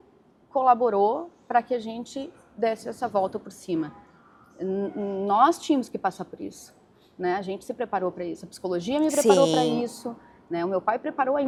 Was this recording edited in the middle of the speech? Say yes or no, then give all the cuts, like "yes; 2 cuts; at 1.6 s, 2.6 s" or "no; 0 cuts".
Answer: no; 0 cuts